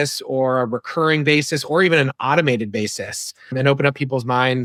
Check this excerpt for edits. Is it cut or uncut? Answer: uncut